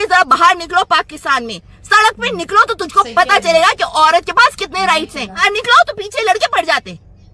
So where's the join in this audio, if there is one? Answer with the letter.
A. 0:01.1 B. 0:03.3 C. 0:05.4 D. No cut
C